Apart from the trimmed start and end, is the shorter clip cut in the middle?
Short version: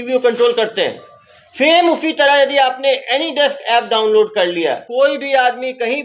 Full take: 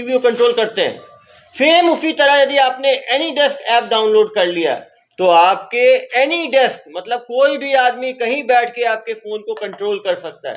yes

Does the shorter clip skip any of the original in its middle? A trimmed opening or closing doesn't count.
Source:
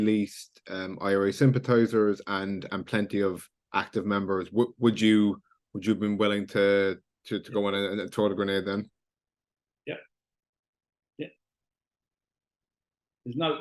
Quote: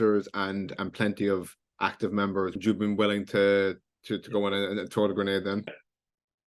yes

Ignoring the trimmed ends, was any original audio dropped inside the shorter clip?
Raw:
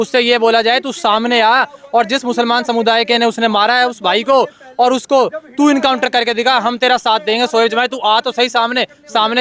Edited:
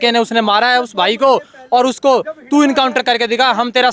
no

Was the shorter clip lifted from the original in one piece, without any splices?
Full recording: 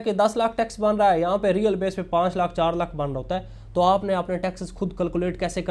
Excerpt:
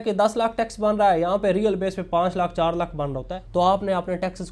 no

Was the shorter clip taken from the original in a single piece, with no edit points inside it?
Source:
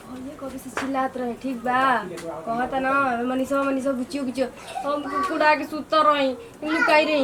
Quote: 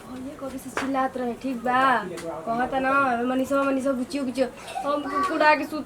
yes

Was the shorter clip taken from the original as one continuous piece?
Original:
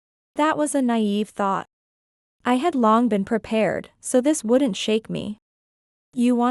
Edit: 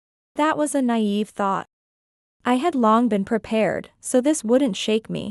yes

